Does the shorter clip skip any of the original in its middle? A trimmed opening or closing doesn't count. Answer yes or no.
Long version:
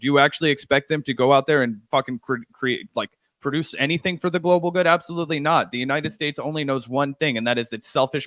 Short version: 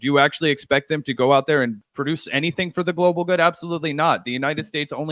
yes